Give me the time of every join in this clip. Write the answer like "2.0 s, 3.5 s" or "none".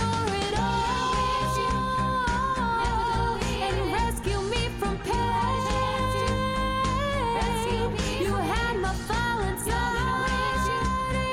none